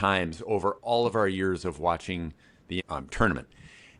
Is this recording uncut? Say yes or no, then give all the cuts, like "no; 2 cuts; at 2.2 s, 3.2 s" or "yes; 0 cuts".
no; 1 cut; at 2.8 s